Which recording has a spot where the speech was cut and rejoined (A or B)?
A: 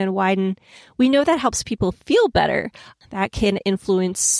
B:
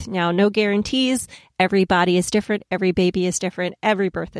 A